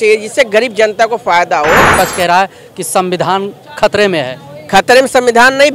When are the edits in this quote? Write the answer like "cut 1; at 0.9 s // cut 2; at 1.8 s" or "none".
cut 1; at 1.9 s